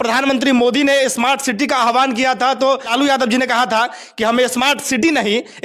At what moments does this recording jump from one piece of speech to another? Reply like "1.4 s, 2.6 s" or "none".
2.9 s